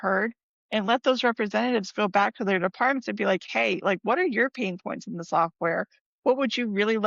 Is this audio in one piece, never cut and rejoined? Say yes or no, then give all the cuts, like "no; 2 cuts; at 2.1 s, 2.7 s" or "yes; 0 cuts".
yes; 0 cuts